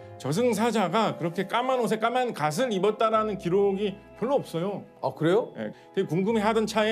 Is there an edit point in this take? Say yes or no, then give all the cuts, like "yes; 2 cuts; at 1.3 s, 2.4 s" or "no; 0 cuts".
yes; 1 cut; at 5.8 s